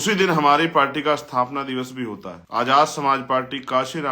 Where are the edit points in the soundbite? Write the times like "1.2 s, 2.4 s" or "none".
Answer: 2.3 s